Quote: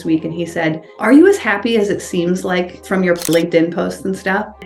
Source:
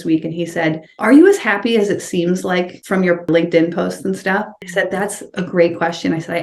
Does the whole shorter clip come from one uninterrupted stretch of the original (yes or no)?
yes